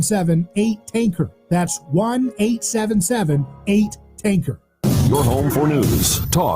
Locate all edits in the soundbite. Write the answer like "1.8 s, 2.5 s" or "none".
4.6 s